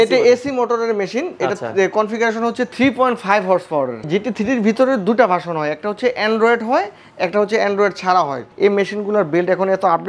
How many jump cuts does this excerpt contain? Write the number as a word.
two